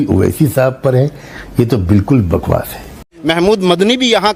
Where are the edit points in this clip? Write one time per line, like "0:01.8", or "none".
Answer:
0:03.1